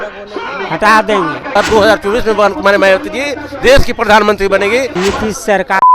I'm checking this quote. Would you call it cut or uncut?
cut